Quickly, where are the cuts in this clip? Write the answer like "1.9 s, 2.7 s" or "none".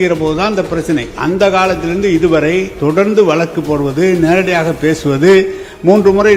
none